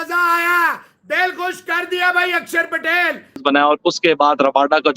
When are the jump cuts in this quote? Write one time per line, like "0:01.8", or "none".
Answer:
0:03.3